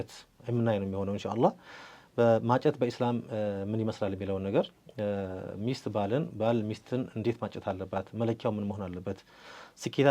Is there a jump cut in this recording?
no; 0 cuts

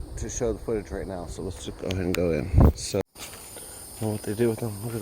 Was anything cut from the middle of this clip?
yes; 1 cut; at 3.0 s

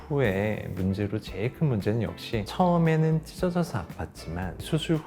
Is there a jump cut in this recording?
no; 0 cuts

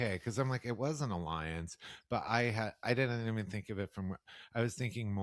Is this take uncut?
yes; 0 cuts

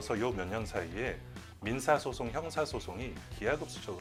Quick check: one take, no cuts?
yes; 0 cuts

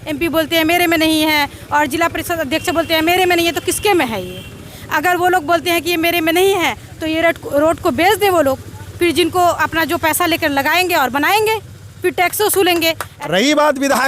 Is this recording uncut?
no; 1 cut; at 13.1 s

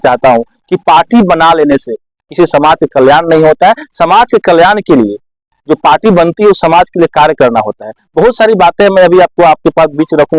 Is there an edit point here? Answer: no; 0 cuts

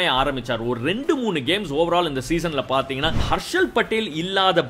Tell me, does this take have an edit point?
yes; 1 cut; at 3.2 s

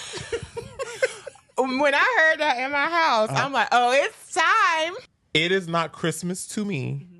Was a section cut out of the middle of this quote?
yes; 1 cut; at 5.1 s

